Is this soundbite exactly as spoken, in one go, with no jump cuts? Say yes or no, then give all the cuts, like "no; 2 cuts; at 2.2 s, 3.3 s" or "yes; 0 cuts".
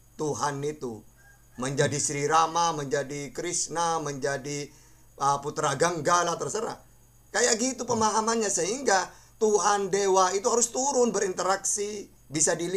yes; 0 cuts